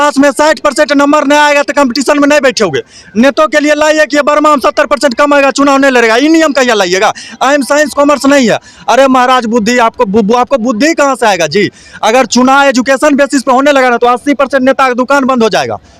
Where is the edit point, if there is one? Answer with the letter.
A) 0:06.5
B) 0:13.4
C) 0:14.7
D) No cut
D